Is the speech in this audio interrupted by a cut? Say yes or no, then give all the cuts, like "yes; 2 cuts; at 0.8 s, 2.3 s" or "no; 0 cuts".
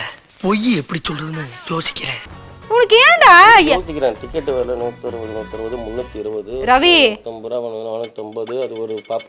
yes; 1 cut; at 2.5 s